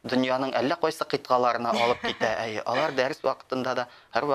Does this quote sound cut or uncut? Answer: uncut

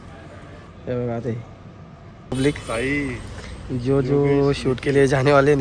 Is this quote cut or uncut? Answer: cut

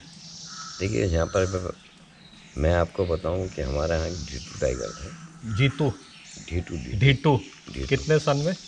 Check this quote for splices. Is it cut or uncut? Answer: uncut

